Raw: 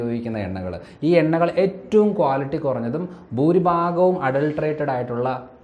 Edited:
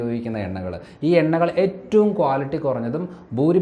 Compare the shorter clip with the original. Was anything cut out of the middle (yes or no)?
no